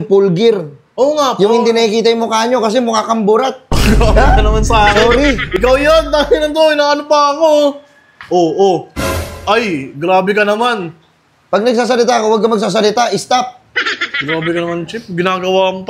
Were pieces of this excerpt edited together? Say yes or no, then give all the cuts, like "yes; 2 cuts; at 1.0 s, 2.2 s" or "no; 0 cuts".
no; 0 cuts